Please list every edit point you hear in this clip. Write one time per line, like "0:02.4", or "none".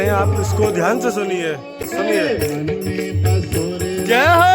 0:01.8